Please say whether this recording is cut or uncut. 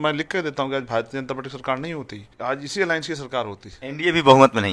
cut